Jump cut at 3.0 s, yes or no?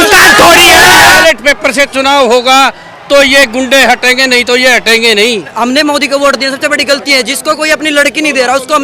no